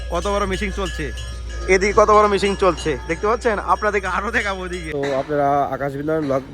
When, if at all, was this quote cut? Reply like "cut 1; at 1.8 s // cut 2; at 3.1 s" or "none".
cut 1; at 4.8 s